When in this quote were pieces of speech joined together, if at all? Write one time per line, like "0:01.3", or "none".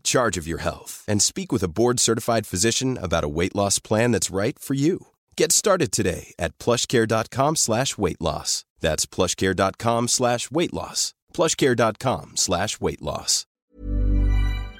0:13.4